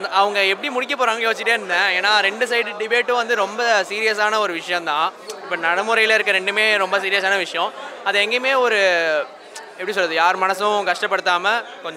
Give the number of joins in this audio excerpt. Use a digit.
0